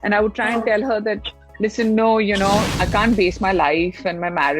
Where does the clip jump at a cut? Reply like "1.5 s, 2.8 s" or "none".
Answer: 2.7 s